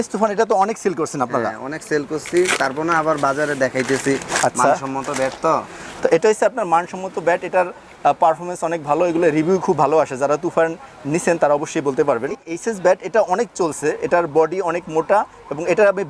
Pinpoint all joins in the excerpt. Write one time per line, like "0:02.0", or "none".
0:12.5